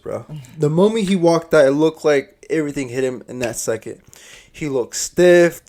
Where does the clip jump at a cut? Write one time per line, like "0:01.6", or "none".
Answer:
none